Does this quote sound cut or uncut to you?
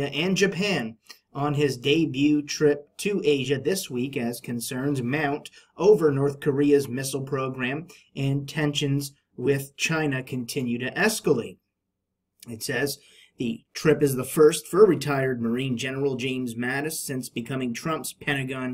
uncut